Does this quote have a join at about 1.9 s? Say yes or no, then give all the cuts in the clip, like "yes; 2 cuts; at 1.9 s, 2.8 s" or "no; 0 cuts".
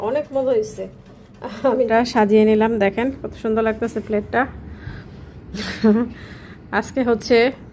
yes; 1 cut; at 1.9 s